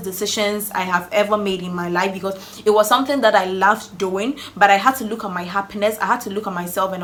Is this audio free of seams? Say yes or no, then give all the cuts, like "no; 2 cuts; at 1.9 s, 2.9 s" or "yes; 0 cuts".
yes; 0 cuts